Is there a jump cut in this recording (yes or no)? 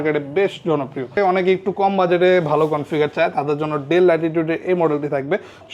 yes